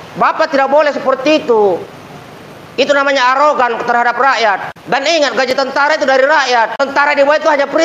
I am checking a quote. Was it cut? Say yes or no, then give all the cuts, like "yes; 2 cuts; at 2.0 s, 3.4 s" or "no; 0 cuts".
yes; 2 cuts; at 4.7 s, 6.8 s